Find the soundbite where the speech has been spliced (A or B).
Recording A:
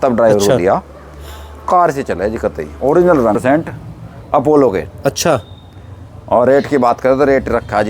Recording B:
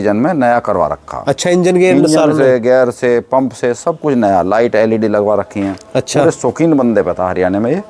A